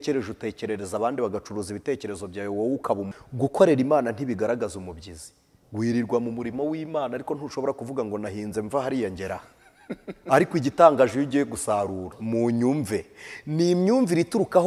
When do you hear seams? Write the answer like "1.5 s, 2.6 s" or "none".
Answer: 3.1 s, 12.1 s